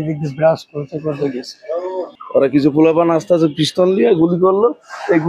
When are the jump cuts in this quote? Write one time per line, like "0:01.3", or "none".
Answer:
0:02.2